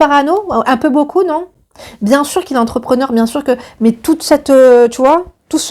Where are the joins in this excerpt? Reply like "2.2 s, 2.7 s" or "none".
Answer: none